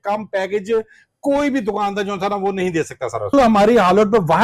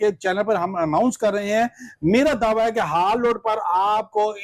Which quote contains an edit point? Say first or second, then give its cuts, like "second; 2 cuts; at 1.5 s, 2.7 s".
first; 1 cut; at 3.3 s